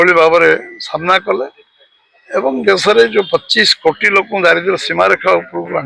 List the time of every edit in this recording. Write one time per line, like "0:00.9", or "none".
none